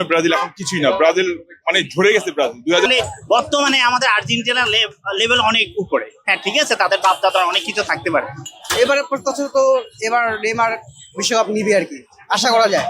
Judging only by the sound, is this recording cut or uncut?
cut